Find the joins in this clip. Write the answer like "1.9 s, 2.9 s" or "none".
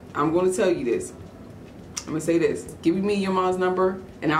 none